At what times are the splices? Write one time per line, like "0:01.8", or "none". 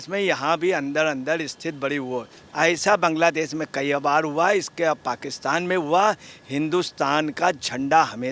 0:02.4